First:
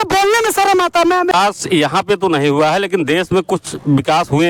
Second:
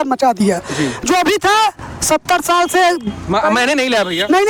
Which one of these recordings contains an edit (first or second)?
first